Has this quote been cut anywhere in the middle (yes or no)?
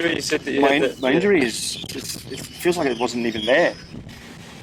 no